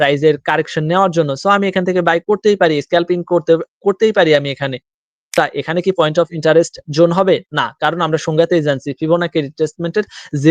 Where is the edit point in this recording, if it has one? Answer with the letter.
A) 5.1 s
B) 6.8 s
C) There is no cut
A